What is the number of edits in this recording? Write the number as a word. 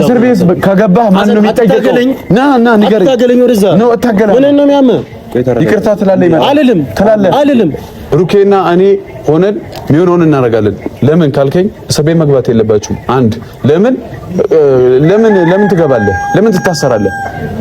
one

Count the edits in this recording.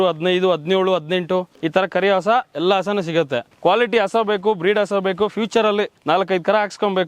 three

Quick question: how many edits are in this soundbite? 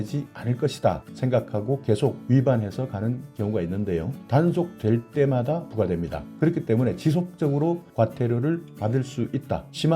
one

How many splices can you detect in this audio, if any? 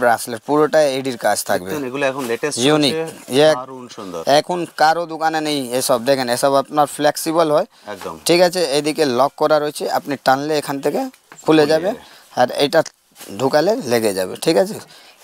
zero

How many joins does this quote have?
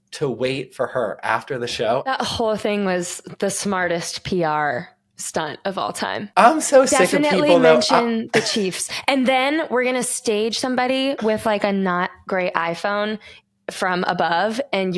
two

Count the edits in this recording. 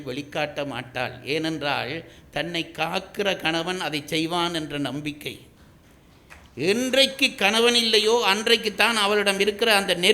zero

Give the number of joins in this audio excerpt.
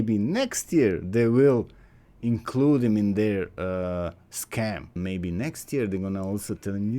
one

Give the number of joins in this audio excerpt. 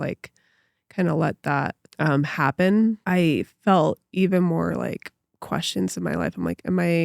two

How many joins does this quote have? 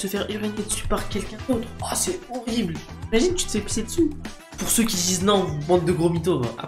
one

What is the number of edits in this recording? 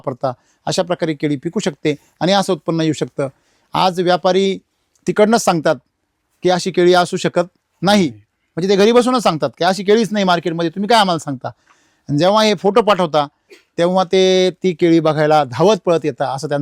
zero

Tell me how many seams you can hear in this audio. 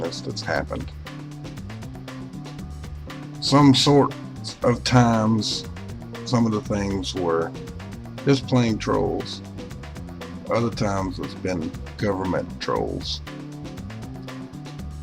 one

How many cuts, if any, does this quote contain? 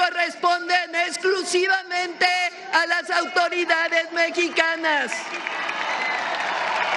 zero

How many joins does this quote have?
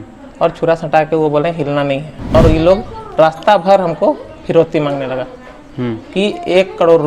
one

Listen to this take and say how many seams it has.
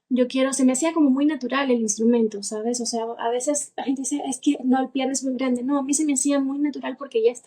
zero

